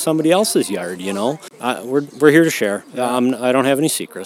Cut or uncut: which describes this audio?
cut